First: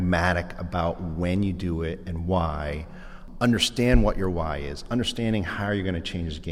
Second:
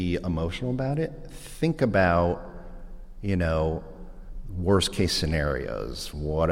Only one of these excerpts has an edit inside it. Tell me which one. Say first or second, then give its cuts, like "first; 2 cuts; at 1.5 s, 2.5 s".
first; 1 cut; at 3.3 s